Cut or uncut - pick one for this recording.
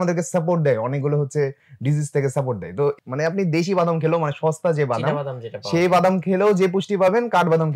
cut